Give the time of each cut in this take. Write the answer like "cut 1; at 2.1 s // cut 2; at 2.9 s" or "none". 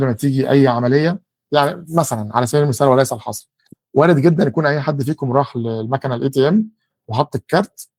none